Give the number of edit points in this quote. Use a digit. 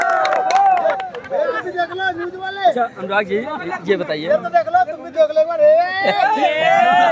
0